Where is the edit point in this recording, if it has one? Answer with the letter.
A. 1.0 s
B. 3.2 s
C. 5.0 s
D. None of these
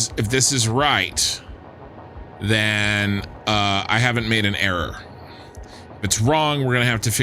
D